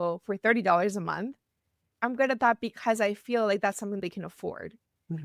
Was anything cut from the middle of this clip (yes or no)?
yes